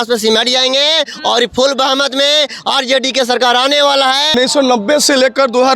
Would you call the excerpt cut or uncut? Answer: cut